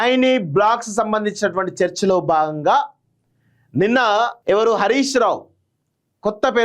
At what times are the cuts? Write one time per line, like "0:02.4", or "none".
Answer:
0:04.4